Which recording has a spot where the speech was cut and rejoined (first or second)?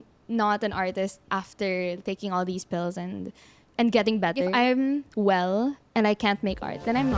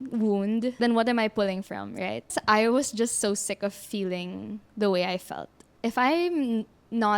second